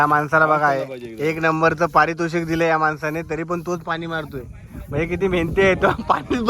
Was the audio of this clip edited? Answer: no; 0 cuts

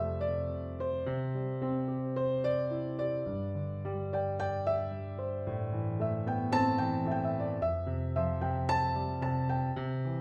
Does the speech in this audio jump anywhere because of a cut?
no; 0 cuts

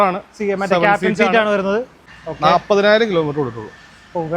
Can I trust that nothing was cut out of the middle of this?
no; 1 cut; at 2.0 s

